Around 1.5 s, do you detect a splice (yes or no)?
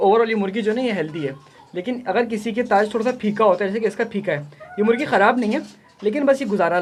no